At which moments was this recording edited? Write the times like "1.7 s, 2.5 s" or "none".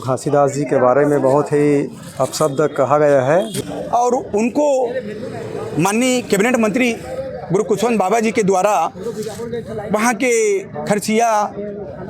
3.5 s